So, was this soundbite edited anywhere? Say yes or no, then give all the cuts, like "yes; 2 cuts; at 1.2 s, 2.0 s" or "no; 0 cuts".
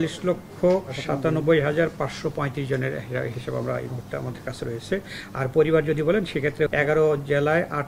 yes; 2 cuts; at 0.9 s, 6.7 s